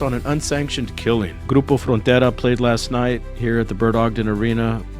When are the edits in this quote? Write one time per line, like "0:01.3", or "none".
0:01.4